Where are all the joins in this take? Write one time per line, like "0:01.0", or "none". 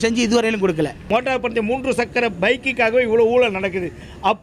0:01.1

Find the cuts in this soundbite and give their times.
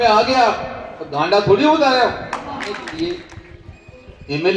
0:02.7

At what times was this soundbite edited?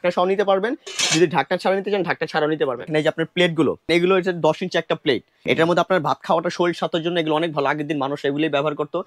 0:02.8
0:03.9
0:05.3

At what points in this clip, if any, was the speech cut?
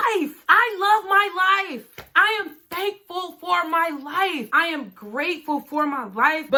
none

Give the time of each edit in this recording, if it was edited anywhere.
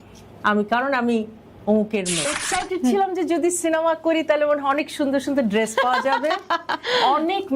0:02.3

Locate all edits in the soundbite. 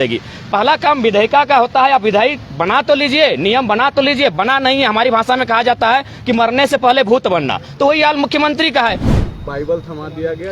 0:09.0

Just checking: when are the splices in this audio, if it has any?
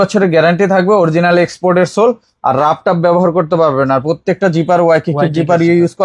none

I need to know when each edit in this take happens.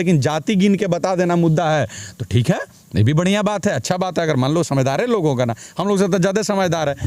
none

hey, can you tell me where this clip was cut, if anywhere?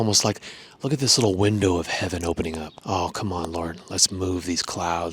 0:02.8

